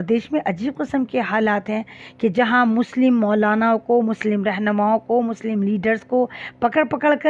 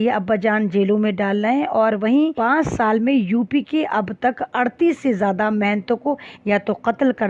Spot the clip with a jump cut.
second; 1 cut; at 2.3 s

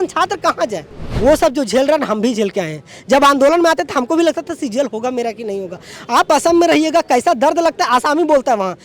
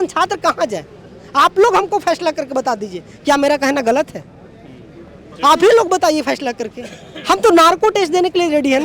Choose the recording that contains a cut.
first; 1 cut; at 1.0 s

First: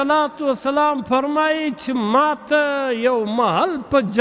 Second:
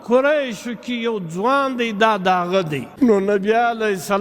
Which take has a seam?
second; 1 cut; at 2.8 s

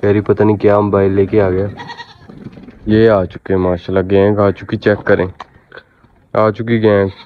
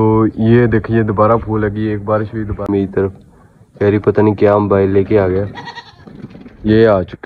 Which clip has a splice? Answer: second; 1 cut; at 2.7 s

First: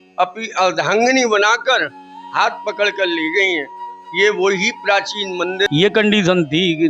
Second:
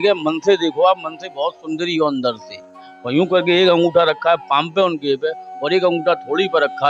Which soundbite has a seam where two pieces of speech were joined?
first; 1 cut; at 5.7 s

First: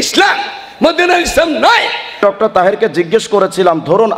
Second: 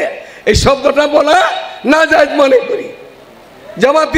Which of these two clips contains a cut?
first; 1 cut; at 2.2 s

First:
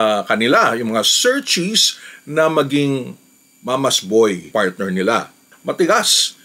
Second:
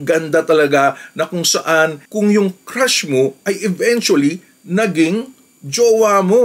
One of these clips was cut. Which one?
first; 2 cuts; at 4.5 s, 5.5 s

